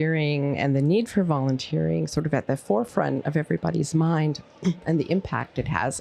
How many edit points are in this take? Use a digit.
1